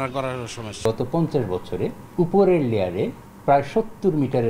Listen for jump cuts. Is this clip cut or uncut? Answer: cut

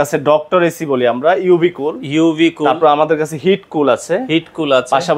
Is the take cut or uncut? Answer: uncut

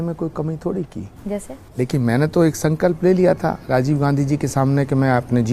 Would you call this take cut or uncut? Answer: uncut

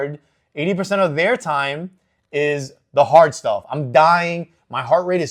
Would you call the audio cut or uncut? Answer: uncut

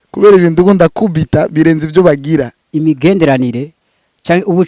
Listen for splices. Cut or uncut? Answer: cut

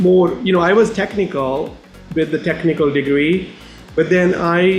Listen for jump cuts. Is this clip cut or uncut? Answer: uncut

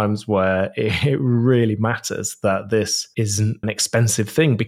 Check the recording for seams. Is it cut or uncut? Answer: cut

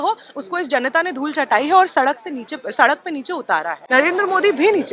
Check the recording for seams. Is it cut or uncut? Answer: cut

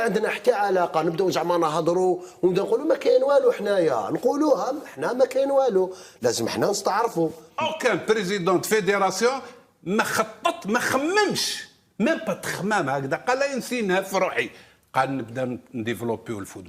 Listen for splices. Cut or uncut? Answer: cut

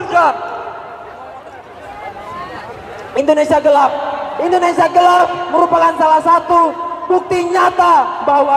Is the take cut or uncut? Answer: cut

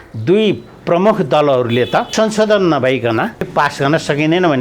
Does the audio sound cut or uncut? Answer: cut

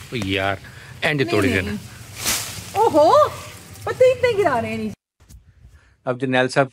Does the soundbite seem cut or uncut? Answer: cut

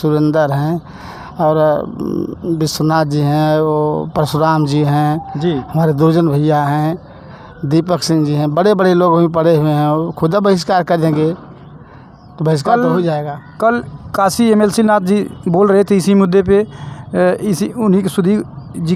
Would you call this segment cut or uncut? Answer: uncut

